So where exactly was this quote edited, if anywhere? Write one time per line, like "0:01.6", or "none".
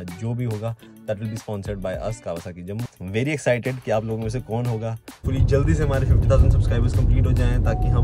0:02.9
0:05.2